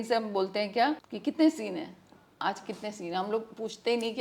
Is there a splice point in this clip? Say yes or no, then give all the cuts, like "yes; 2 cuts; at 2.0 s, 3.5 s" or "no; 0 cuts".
yes; 1 cut; at 1.1 s